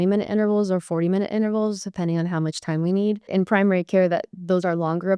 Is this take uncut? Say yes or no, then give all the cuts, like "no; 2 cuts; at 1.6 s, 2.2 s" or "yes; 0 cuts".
no; 1 cut; at 3.3 s